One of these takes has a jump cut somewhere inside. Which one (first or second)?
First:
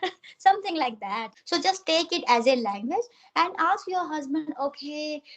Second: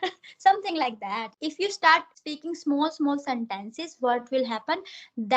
first